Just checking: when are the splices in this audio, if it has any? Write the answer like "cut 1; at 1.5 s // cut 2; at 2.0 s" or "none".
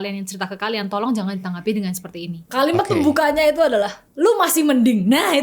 cut 1; at 2.4 s // cut 2; at 4.0 s